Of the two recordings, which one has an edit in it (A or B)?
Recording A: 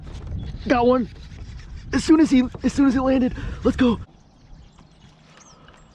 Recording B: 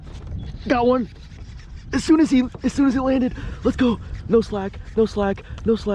A